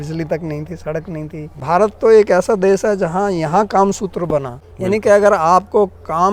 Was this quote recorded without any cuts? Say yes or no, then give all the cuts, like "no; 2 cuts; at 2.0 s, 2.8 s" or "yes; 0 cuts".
no; 2 cuts; at 1.5 s, 4.6 s